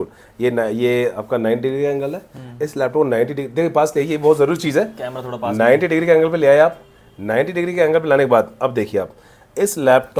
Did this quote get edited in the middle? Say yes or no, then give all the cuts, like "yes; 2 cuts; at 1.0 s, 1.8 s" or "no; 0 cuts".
no; 0 cuts